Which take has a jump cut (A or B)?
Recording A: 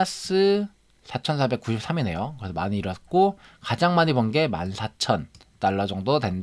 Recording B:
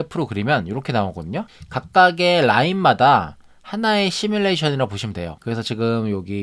B